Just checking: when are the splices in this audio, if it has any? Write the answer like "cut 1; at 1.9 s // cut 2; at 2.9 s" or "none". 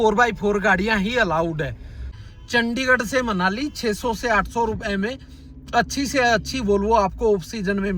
cut 1; at 2.1 s